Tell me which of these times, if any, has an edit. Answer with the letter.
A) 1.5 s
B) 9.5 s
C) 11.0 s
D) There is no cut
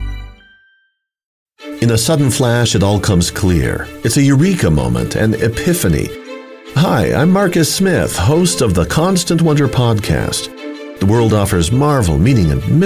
A